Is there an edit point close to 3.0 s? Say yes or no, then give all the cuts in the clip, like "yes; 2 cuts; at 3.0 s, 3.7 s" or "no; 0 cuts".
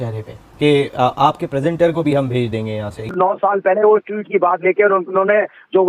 yes; 1 cut; at 3.0 s